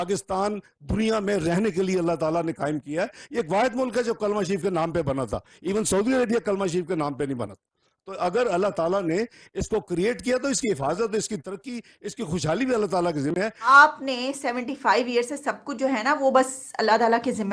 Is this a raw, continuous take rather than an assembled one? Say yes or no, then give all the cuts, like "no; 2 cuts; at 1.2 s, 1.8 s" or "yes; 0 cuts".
no; 1 cut; at 13.8 s